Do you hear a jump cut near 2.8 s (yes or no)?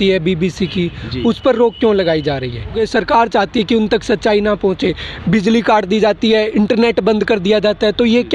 yes